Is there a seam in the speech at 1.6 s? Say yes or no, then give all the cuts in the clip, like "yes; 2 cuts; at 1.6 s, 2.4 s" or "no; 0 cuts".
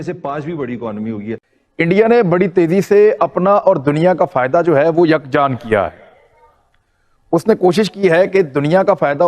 yes; 1 cut; at 1.6 s